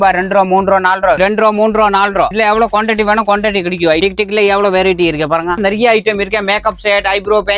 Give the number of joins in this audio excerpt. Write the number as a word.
three